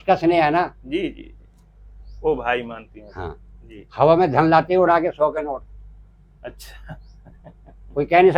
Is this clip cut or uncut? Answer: uncut